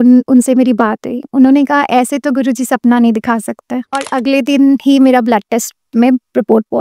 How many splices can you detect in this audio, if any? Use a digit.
1